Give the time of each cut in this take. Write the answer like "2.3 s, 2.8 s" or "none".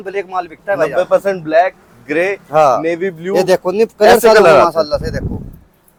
none